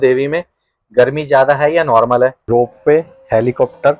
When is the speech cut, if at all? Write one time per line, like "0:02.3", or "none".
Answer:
0:02.4